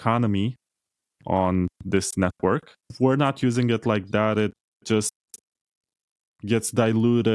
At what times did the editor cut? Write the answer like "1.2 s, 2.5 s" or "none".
2.8 s